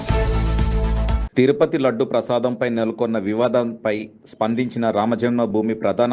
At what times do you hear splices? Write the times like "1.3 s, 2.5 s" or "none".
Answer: 1.2 s